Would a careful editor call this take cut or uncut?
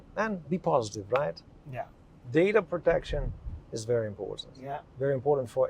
cut